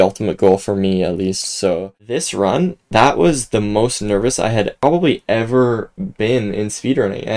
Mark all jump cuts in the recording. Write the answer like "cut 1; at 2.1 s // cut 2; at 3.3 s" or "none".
cut 1; at 2.0 s